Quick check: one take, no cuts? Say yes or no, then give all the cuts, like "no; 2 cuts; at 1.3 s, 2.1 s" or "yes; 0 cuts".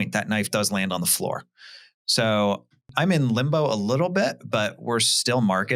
no; 1 cut; at 2.9 s